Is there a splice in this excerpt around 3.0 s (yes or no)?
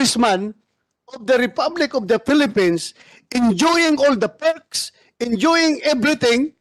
no